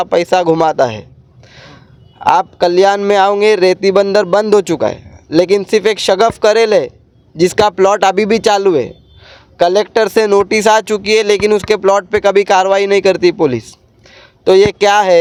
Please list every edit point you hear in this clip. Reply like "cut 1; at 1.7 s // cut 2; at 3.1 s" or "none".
none